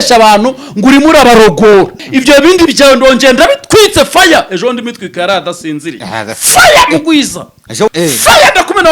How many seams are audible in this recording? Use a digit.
2